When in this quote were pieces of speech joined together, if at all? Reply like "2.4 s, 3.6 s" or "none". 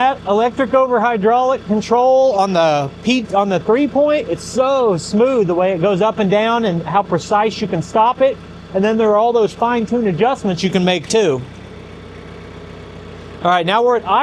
none

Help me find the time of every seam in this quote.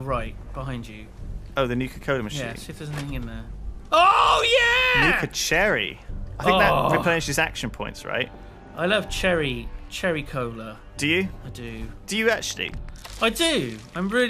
12.0 s

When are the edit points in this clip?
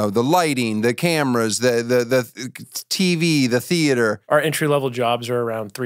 4.2 s

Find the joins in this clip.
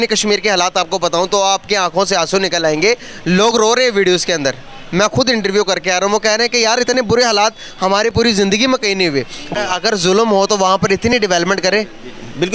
9.5 s

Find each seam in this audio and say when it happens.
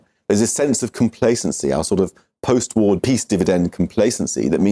3.0 s

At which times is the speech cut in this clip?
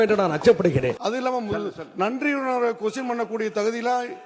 1.0 s

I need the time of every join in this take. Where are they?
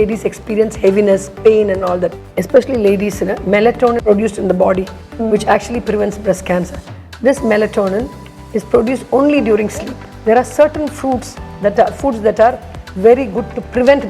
2.2 s, 4.0 s, 10.0 s

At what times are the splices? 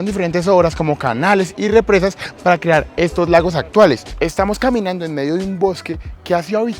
4.1 s

